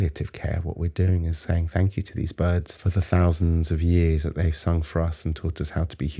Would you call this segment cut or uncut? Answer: cut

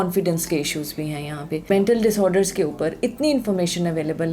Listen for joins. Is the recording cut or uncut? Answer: cut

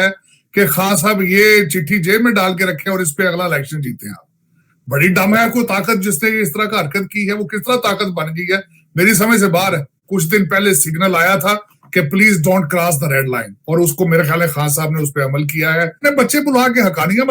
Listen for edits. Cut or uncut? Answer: cut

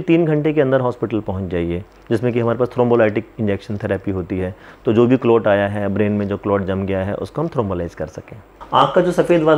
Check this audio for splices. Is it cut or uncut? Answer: cut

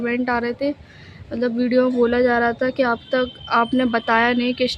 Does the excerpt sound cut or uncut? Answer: uncut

